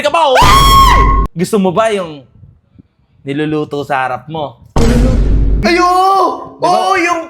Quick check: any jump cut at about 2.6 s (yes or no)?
no